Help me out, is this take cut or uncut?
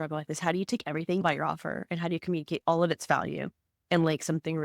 cut